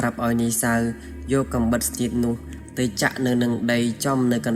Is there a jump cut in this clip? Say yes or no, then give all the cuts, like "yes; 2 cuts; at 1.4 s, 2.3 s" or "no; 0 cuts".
no; 0 cuts